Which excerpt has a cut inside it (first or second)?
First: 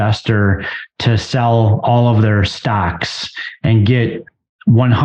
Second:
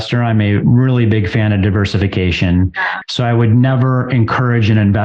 second